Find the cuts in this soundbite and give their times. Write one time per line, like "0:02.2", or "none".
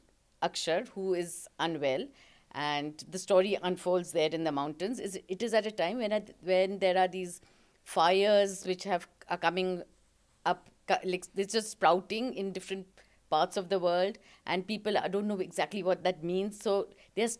none